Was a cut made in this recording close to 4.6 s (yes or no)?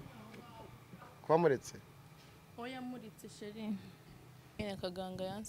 yes